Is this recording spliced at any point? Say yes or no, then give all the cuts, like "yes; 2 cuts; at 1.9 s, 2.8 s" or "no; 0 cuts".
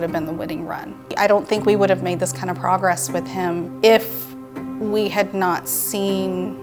yes; 1 cut; at 1.0 s